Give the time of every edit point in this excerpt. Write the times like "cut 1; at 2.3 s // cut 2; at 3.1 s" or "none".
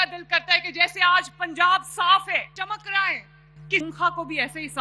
cut 1; at 2.5 s // cut 2; at 3.8 s